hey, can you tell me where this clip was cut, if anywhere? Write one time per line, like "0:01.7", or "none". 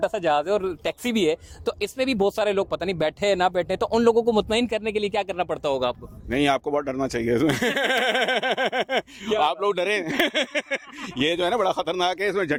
none